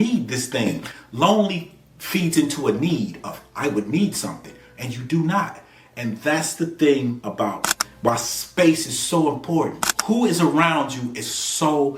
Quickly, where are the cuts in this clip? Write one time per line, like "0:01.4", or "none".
0:09.9